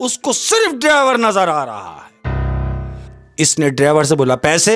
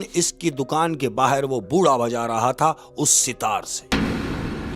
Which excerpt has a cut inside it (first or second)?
first